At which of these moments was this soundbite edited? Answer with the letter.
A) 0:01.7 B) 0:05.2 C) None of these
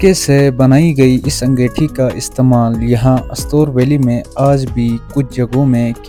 C